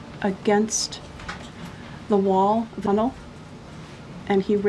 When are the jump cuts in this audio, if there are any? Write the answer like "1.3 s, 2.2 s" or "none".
2.8 s

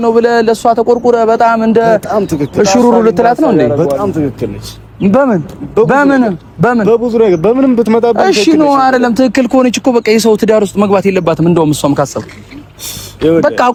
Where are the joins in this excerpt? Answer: none

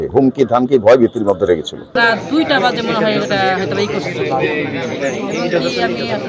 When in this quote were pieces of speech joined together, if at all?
1.9 s

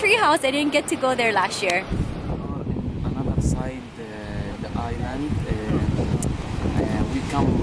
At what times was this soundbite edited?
none

